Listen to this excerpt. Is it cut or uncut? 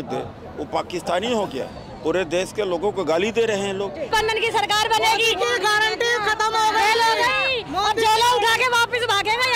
cut